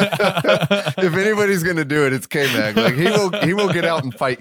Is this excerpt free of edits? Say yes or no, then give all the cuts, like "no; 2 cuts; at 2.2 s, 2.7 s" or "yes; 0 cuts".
yes; 0 cuts